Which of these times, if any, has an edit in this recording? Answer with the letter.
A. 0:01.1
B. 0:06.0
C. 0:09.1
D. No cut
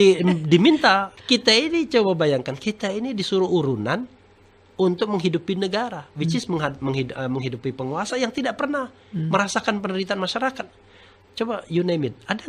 A